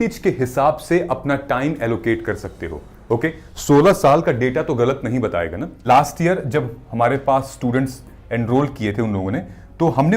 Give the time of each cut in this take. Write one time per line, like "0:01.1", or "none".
0:05.8